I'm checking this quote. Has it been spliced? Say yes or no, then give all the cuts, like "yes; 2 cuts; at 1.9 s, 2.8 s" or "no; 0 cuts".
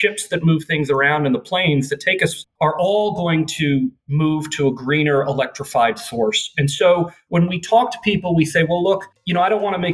yes; 1 cut; at 7.2 s